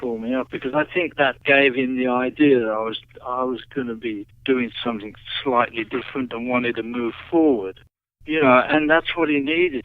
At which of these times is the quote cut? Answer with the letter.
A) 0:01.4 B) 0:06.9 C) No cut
A